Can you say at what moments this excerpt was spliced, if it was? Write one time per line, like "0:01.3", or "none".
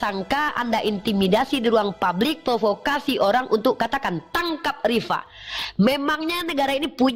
none